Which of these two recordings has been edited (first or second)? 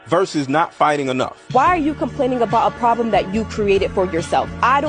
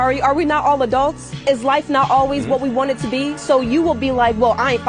second